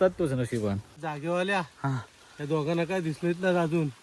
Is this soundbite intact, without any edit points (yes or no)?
no